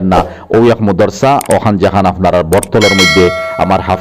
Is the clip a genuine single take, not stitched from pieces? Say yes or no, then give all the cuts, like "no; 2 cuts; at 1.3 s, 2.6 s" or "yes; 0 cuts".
yes; 0 cuts